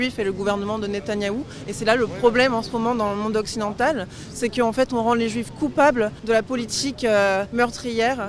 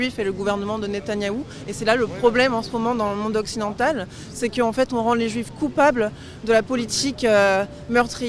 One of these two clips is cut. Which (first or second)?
first